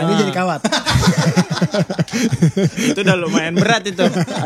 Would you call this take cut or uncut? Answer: uncut